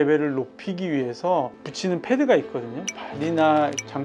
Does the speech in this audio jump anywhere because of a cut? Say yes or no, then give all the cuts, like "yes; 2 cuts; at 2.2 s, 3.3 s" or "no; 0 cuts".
yes; 1 cut; at 2.8 s